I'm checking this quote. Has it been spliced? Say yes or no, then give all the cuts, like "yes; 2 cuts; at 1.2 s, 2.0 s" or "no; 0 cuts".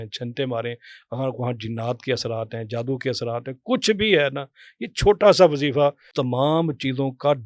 yes; 1 cut; at 6.1 s